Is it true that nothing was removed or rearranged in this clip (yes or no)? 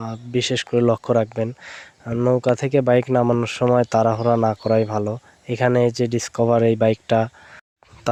yes